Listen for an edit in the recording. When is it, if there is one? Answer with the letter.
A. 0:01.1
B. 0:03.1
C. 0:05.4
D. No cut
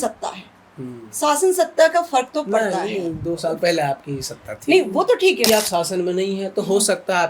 C